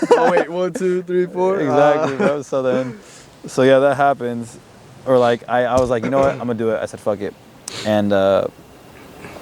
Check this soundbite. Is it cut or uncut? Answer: uncut